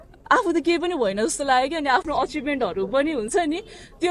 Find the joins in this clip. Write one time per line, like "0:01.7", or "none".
none

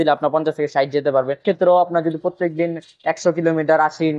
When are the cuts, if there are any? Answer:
0:01.4

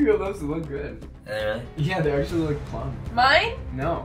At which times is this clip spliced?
none

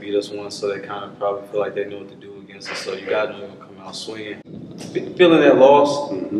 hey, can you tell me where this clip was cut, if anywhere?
0:04.4

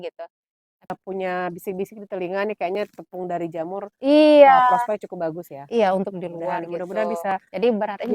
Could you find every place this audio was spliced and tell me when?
0:00.9

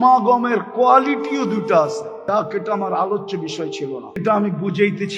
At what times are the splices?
0:02.1
0:04.2

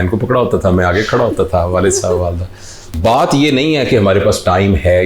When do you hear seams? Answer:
0:02.9

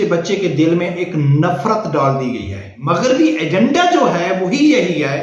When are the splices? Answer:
0:02.8

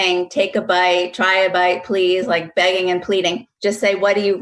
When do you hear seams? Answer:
0:03.5

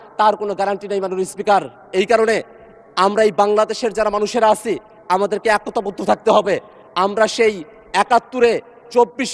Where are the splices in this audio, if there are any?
none

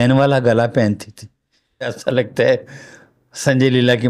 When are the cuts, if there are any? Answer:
0:01.9

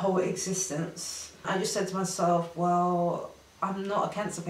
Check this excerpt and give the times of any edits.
0:01.4

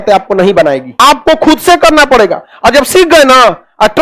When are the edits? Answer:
0:01.0

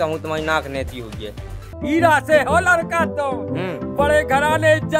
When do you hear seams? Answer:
0:01.7

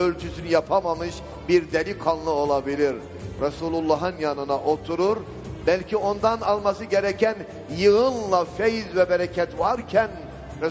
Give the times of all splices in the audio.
none

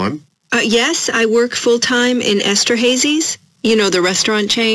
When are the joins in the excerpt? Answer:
none

